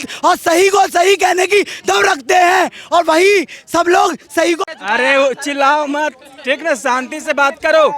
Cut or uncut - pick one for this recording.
cut